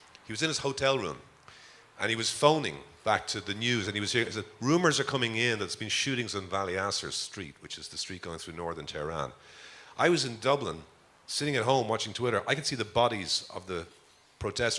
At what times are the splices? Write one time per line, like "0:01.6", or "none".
none